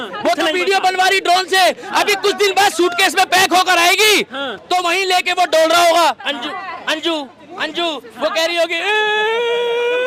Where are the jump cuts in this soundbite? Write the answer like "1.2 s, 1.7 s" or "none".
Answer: none